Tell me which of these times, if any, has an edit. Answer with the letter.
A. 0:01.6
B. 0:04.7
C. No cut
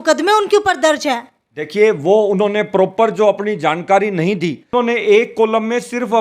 B